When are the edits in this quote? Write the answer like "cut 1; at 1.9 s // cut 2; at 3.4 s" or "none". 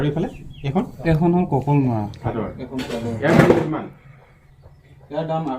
cut 1; at 2.2 s